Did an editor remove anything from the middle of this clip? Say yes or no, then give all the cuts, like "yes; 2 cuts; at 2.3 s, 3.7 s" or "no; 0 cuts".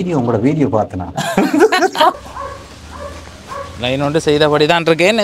yes; 1 cut; at 2.1 s